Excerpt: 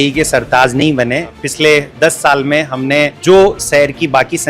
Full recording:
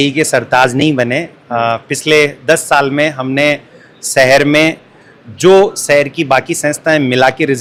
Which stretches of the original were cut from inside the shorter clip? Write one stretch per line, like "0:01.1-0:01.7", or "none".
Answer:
0:01.4-0:01.9
0:03.6-0:05.3